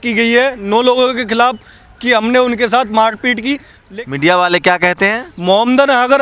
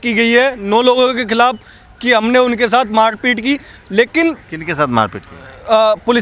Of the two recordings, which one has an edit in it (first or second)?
first